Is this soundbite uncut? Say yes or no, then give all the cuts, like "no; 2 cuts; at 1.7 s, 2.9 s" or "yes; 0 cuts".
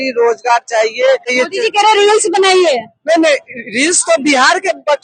no; 1 cut; at 1.3 s